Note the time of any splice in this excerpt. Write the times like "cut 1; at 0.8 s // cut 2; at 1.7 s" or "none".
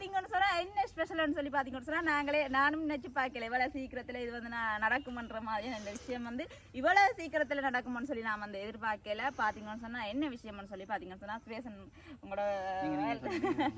none

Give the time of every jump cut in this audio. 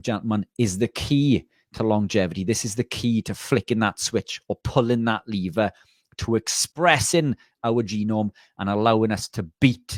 none

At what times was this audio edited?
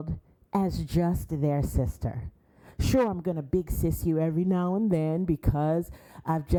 none

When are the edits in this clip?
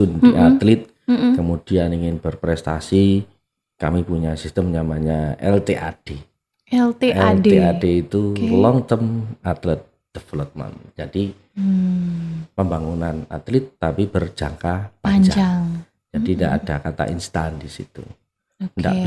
none

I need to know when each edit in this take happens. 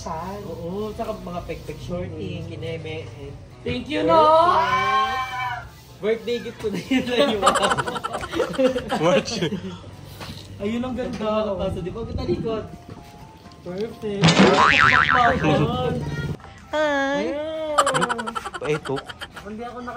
cut 1; at 16.3 s

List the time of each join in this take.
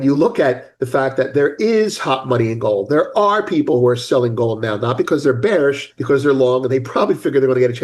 cut 1; at 5.9 s

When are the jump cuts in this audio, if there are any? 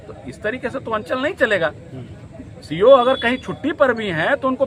none

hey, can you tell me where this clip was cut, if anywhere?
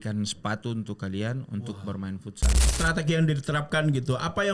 cut 1; at 2.7 s

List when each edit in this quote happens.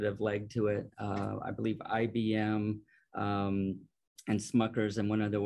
none

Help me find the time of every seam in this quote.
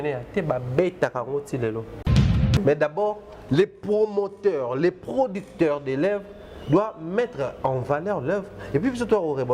cut 1; at 2.4 s

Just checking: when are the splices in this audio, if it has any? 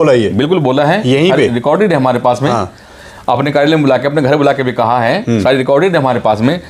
none

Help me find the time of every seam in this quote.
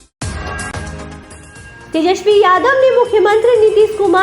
cut 1; at 1.3 s

